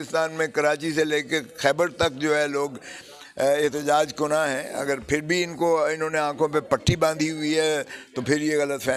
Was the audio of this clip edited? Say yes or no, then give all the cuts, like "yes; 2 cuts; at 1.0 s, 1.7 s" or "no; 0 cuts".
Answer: no; 0 cuts